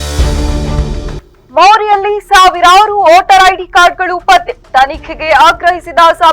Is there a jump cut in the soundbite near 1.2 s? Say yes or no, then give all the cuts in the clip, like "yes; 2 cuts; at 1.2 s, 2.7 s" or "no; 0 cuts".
yes; 1 cut; at 1.2 s